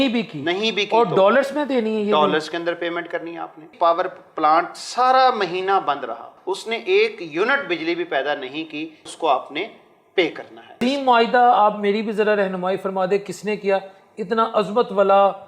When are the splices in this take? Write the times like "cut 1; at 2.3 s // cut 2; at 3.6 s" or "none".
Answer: cut 1; at 3.7 s // cut 2; at 6.3 s // cut 3; at 9.1 s // cut 4; at 10.8 s

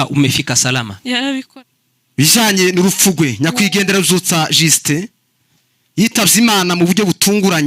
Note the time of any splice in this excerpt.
cut 1; at 1.5 s

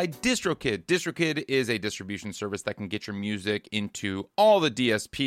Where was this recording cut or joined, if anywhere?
none

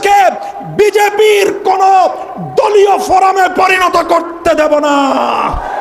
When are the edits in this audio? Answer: none

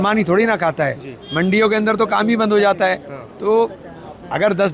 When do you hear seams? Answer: none

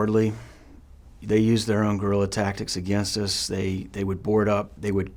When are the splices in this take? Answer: none

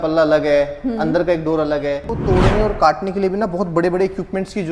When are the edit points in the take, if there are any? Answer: cut 1; at 2.1 s

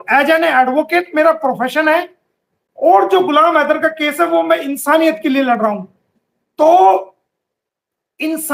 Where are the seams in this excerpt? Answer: none

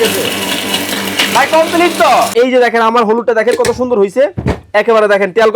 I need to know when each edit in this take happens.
cut 1; at 2.3 s

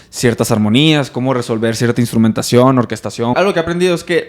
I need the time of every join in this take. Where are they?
cut 1; at 3.3 s

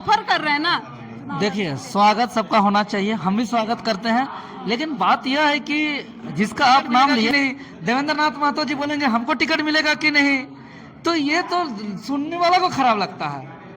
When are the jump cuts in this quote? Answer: cut 1; at 7.3 s

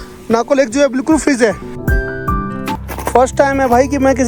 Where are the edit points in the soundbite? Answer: cut 1; at 2.8 s

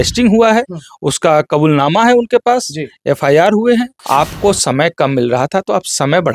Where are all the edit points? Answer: cut 1; at 4.0 s

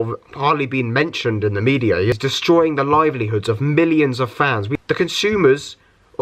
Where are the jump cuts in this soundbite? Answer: cut 1; at 2.1 s // cut 2; at 4.6 s

